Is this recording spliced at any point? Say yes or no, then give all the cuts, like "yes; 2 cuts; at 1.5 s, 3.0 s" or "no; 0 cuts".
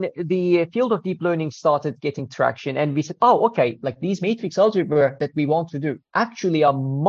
no; 0 cuts